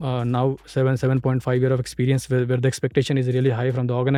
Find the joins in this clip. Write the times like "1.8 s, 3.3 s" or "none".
none